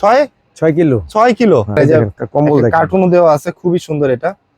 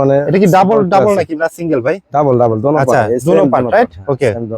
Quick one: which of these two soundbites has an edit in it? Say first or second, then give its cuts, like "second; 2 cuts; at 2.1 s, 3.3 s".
first; 1 cut; at 1.7 s